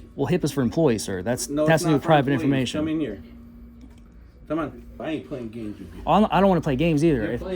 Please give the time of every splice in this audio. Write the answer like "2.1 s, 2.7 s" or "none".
5.0 s